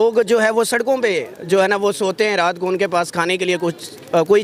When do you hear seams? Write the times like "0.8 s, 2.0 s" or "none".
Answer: none